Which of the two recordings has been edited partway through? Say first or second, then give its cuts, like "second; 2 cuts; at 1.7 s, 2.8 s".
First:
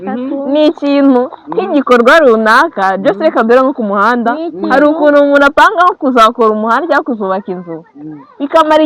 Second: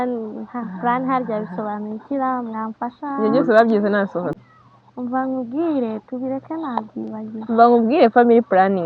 second; 1 cut; at 4.3 s